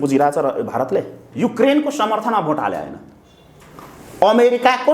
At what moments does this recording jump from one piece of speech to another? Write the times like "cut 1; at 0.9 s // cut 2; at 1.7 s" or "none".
cut 1; at 1.3 s